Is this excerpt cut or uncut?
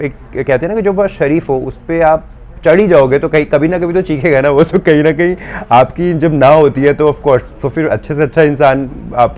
uncut